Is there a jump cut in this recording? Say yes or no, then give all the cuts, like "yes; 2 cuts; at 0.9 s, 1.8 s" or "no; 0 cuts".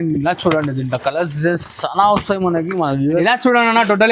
yes; 1 cut; at 3.2 s